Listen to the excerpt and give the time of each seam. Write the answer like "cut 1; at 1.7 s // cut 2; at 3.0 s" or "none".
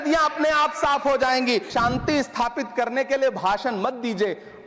cut 1; at 1.7 s